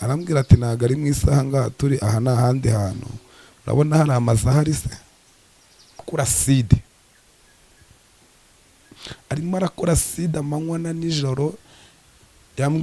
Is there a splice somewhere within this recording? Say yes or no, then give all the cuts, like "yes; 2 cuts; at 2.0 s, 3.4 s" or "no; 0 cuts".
yes; 1 cut; at 6.1 s